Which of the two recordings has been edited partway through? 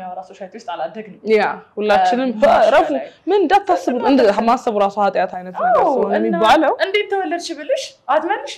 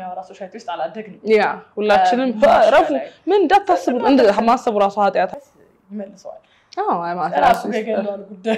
second; 1 cut; at 5.4 s

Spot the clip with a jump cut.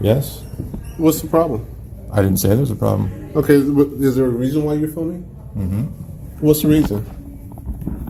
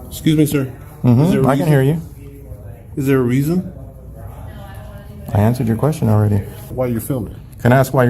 second; 1 cut; at 6.7 s

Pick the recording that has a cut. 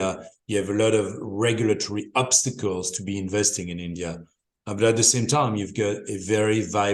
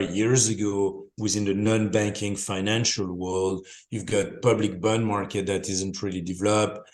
second; 1 cut; at 1.1 s

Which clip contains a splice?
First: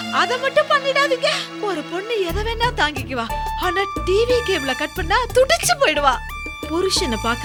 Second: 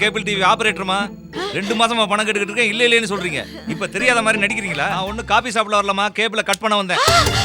second; 1 cut; at 5.0 s

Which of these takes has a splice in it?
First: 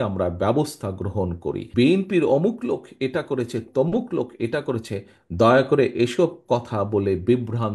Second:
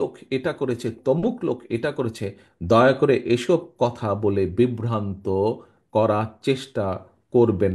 first; 1 cut; at 1.6 s

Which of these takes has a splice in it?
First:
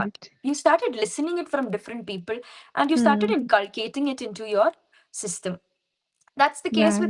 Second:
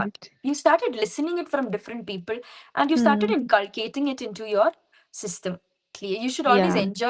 second; 1 cut; at 6.0 s

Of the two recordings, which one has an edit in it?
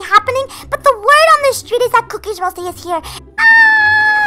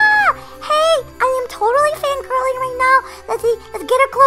first; 1 cut; at 3.1 s

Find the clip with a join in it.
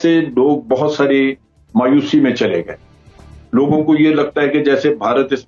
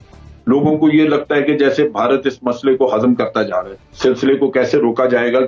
second; 1 cut; at 3.7 s

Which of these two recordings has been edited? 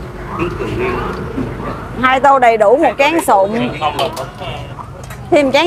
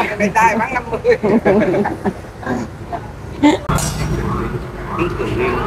second; 1 cut; at 3.6 s

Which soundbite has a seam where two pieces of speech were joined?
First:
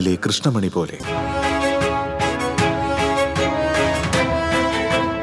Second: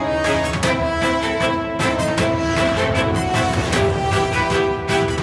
first; 1 cut; at 1.0 s

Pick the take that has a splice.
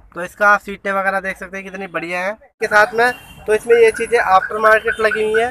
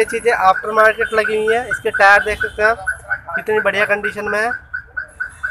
first; 1 cut; at 2.6 s

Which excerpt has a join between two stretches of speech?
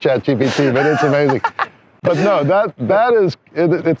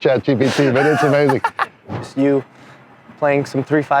second; 1 cut; at 2.0 s

